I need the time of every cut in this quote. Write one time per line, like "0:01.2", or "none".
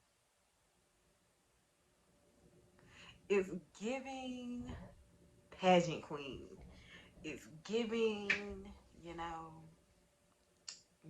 none